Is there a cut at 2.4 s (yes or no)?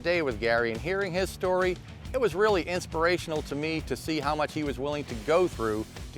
no